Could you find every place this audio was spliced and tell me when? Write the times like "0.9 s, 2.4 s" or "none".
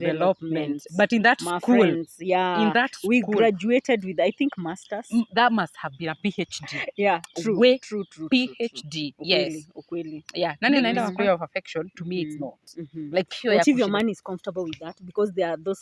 11.1 s